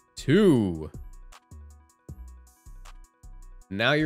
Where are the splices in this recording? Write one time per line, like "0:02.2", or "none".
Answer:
none